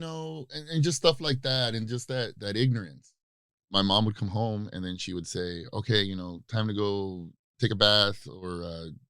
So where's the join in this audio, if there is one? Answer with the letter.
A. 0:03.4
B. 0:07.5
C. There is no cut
A